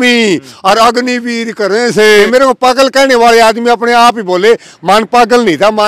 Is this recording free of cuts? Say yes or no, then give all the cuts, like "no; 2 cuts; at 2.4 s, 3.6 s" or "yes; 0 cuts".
no; 1 cut; at 2.2 s